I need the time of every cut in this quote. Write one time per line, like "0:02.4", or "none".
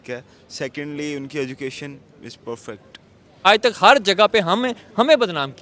0:03.5